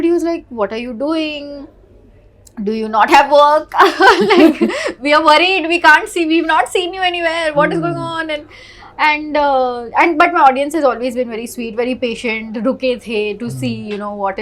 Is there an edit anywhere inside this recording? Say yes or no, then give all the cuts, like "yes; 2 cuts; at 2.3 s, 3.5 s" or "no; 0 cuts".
no; 0 cuts